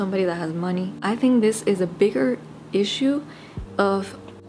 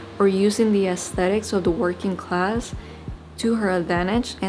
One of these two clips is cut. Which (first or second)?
first